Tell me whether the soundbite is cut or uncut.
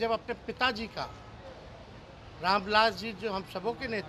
uncut